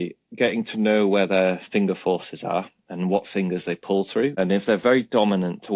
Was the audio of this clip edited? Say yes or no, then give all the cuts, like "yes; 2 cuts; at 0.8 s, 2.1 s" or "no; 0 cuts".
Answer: yes; 1 cut; at 4.3 s